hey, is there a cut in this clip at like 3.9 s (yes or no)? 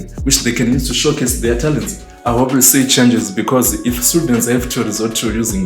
no